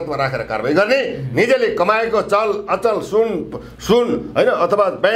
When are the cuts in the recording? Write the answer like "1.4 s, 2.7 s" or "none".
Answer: none